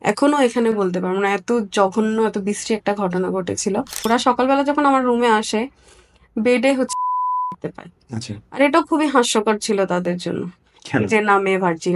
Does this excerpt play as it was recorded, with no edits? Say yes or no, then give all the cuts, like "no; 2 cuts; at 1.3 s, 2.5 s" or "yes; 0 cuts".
no; 1 cut; at 4.1 s